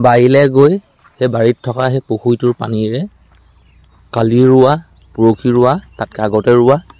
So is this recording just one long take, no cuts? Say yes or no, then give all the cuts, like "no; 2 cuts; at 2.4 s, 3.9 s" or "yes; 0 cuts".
yes; 0 cuts